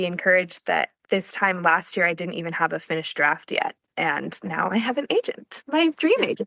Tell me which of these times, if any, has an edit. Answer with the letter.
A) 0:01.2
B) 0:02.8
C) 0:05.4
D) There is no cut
D